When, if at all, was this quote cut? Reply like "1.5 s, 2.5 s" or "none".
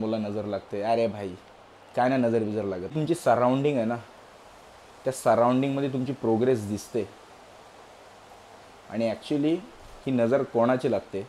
3.0 s